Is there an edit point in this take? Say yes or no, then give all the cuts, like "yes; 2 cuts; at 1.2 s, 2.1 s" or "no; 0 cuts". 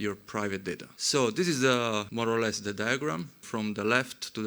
yes; 3 cuts; at 0.9 s, 2.1 s, 3.4 s